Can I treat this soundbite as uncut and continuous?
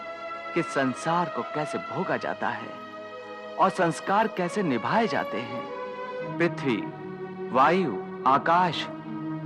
no; 1 cut; at 6.3 s

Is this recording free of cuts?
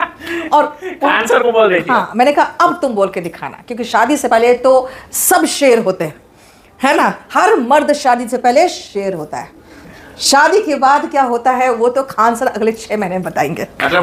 yes; 0 cuts

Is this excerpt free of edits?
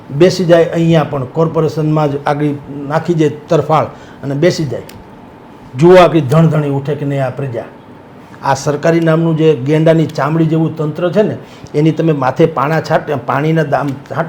yes; 0 cuts

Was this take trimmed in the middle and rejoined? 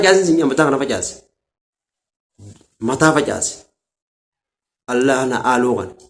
no; 0 cuts

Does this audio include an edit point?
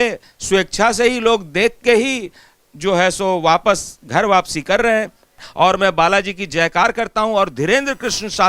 yes; 1 cut; at 5.5 s

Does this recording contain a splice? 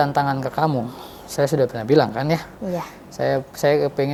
no; 0 cuts

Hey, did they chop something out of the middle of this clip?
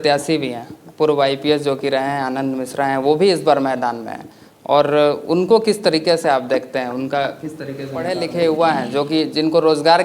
yes; 1 cut; at 8.1 s

